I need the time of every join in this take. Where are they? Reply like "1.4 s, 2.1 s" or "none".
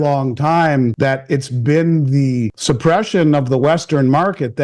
0.9 s, 2.6 s